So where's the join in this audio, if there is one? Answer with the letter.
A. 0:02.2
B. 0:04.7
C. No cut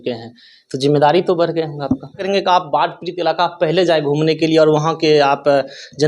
A